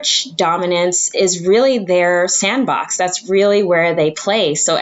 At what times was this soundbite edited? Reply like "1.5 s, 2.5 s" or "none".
none